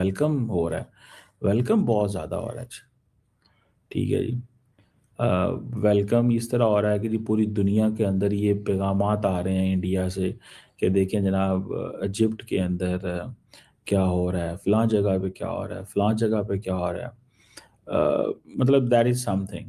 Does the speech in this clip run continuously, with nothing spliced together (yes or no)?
yes